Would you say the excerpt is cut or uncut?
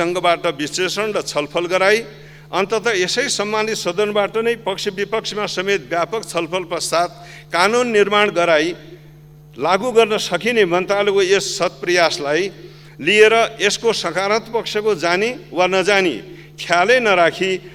uncut